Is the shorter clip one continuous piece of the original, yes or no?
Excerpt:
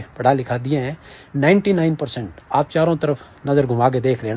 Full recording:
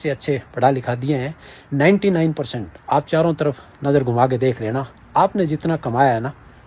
yes